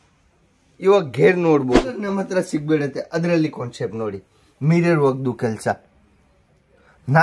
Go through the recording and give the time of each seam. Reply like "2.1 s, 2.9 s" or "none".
2.0 s